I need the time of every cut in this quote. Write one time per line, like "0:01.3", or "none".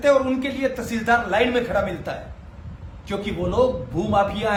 none